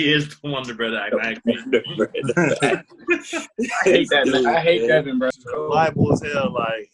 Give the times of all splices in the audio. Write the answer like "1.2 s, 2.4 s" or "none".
5.3 s